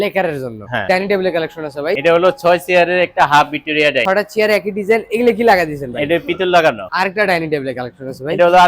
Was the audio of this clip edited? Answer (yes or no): yes